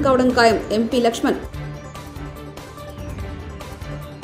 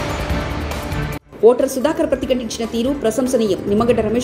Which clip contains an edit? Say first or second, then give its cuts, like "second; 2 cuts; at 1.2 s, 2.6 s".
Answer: second; 1 cut; at 1.1 s